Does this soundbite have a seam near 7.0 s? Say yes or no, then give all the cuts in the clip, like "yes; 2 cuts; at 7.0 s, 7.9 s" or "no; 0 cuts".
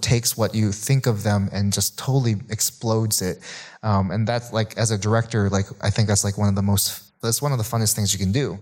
no; 0 cuts